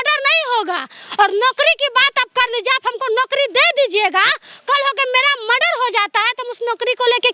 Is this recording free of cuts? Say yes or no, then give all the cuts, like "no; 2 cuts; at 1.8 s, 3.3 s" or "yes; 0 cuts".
yes; 0 cuts